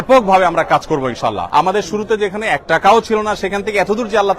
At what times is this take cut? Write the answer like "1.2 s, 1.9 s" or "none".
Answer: 1.4 s